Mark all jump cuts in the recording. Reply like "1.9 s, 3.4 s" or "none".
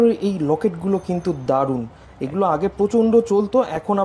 none